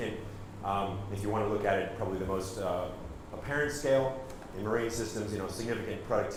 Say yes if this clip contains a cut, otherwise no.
no